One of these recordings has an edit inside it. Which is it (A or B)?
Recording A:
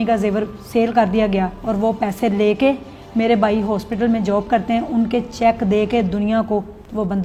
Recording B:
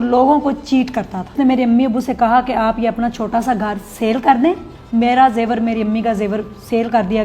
B